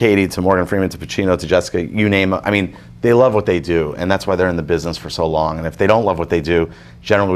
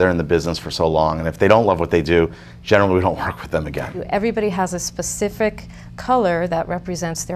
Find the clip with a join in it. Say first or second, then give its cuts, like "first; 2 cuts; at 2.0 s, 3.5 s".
second; 1 cut; at 4.0 s